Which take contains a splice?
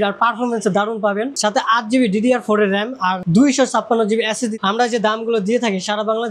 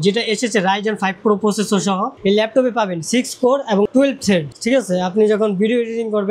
first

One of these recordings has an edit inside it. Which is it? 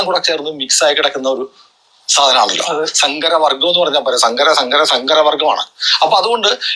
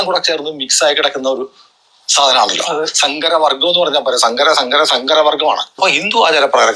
second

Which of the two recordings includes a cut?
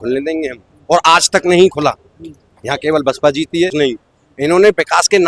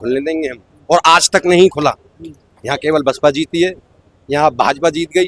first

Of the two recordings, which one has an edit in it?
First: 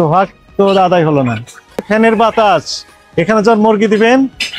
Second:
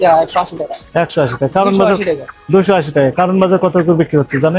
first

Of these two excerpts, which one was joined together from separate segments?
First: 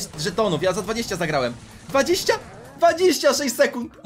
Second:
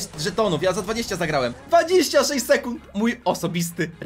second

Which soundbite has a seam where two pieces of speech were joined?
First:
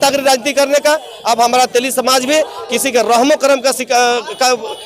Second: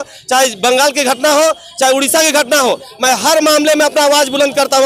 first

